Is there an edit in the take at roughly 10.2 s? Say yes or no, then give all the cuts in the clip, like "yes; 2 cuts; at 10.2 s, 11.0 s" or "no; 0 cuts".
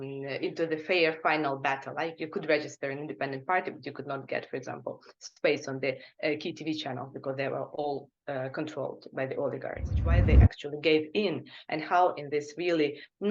yes; 1 cut; at 10.2 s